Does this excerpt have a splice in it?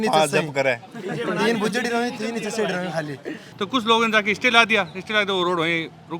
yes; 1 cut; at 3.4 s

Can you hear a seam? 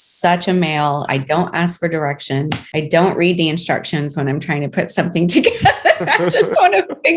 yes; 2 cuts; at 1.1 s, 2.6 s

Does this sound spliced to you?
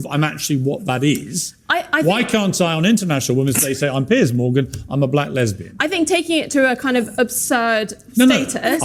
no; 0 cuts

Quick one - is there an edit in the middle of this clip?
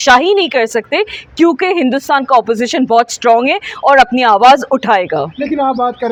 no; 0 cuts

